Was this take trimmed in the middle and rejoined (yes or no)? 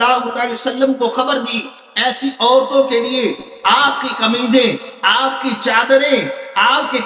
no